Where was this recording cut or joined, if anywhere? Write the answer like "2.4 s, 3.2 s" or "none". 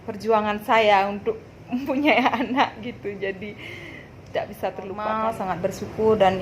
5.1 s